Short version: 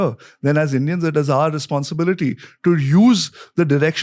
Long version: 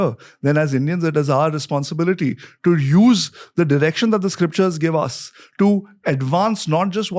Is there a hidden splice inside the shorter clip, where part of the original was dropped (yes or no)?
no